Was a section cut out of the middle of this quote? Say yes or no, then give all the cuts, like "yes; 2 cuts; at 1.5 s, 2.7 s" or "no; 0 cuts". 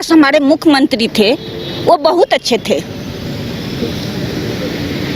no; 0 cuts